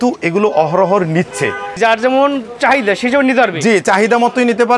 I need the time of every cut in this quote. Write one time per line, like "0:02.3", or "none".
0:01.7